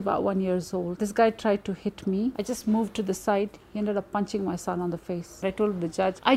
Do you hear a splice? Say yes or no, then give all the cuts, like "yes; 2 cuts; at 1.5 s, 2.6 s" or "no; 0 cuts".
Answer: yes; 2 cuts; at 0.9 s, 5.4 s